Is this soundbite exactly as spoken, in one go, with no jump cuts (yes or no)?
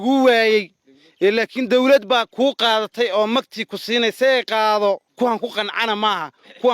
no